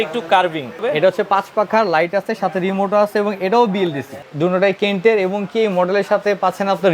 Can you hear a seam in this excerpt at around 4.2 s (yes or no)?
yes